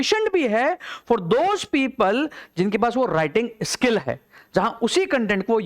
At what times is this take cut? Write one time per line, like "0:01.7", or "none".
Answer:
none